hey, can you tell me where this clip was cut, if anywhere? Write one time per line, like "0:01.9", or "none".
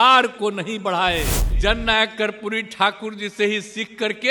0:01.6